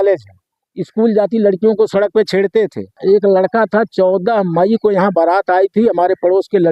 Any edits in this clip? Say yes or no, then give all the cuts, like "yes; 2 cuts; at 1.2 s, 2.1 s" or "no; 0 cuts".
yes; 1 cut; at 3.0 s